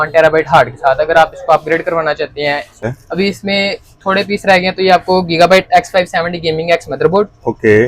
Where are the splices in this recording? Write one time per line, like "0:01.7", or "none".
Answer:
0:02.8

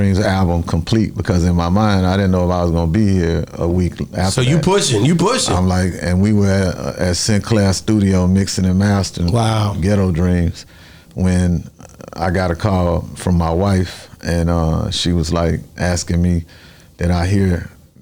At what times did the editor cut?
none

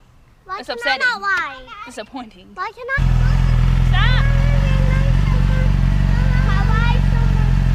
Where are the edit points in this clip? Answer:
none

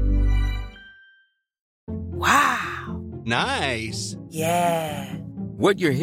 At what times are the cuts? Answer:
0:01.7

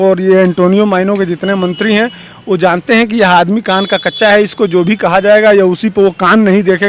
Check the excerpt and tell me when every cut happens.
none

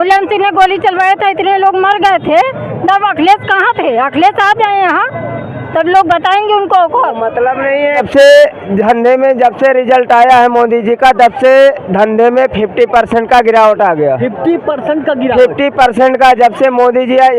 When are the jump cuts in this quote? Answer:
0:08.1

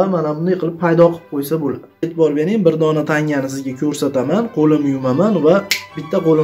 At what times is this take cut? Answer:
0:02.1

